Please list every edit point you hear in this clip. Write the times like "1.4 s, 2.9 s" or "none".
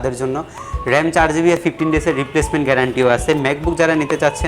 1.6 s